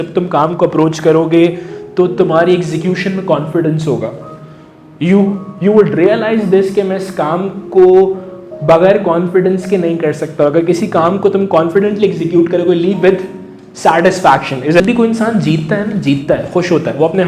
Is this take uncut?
yes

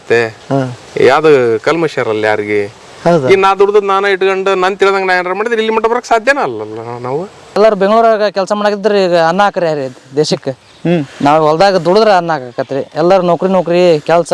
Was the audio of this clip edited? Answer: yes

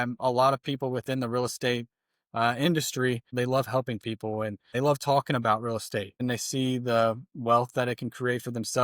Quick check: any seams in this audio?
yes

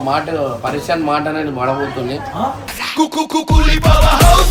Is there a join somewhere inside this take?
no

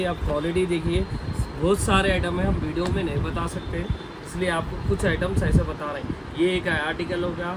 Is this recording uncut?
yes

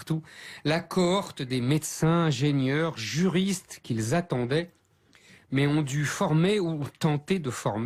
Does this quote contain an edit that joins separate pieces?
no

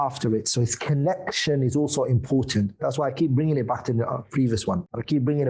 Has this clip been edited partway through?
no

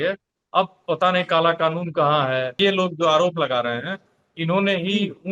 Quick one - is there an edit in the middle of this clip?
yes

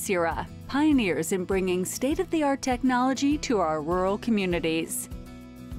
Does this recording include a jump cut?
yes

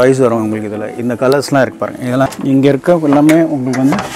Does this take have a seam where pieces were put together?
yes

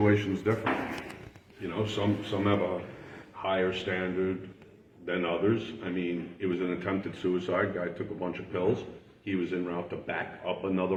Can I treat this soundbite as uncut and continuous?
yes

